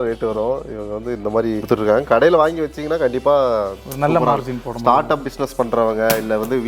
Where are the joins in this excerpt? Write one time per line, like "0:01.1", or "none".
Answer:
0:01.6